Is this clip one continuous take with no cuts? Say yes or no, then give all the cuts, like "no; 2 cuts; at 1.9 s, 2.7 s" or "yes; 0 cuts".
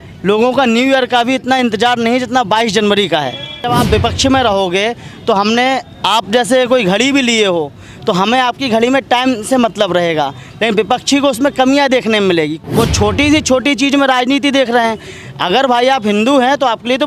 no; 2 cuts; at 3.7 s, 12.6 s